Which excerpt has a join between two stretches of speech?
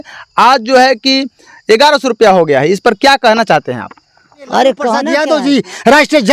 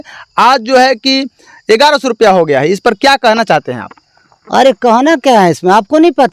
first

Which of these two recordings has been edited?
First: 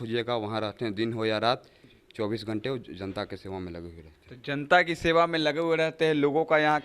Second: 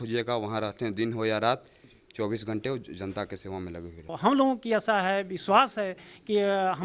second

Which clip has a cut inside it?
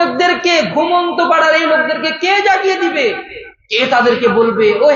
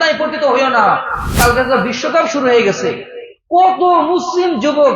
second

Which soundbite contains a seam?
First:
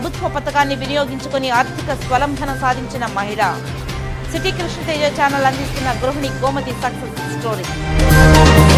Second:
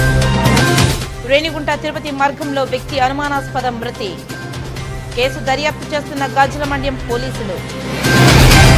second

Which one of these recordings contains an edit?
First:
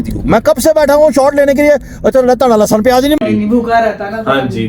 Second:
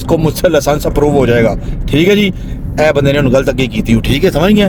first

